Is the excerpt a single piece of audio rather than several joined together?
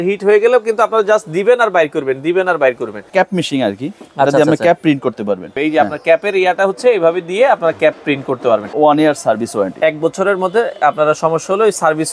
no; 3 cuts; at 3.1 s, 5.6 s, 8.7 s

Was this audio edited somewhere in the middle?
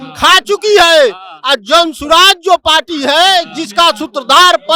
no; 0 cuts

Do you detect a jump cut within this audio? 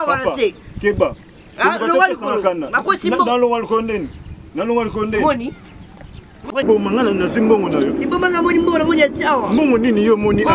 yes; 1 cut; at 6.6 s

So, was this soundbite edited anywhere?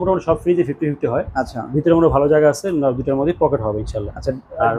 no; 0 cuts

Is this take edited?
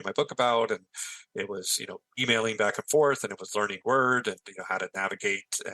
yes; 1 cut; at 2.1 s

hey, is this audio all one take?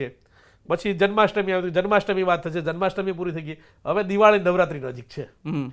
yes; 0 cuts

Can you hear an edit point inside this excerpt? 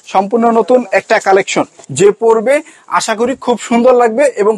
yes; 1 cut; at 1.8 s

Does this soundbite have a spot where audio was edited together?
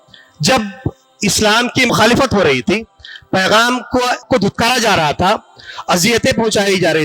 yes; 2 cuts; at 1.9 s, 4.2 s

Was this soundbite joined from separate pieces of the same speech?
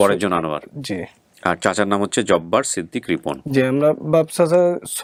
no; 0 cuts

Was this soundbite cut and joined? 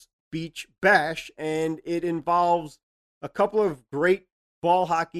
yes; 1 cut; at 1.3 s

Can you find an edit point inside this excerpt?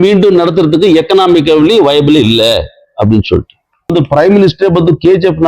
yes; 1 cut; at 3.9 s

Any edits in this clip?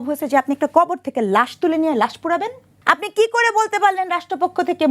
yes; 1 cut; at 2.7 s

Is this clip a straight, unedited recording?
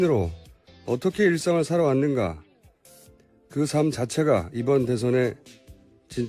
no; 1 cut; at 1.9 s

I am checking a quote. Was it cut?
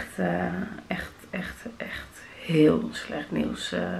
no; 0 cuts

